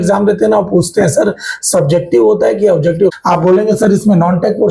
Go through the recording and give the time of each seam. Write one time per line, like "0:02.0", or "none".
0:03.2